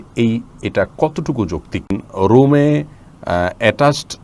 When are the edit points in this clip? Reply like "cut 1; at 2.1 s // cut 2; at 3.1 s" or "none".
cut 1; at 2.0 s